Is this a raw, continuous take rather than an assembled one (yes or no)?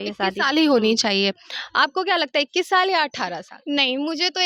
yes